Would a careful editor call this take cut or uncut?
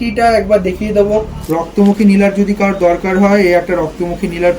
cut